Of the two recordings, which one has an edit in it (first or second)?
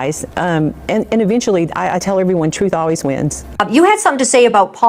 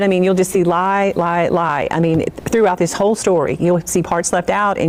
first